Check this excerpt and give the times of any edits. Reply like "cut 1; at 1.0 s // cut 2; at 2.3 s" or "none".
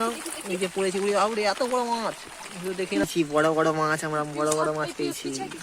cut 1; at 3.0 s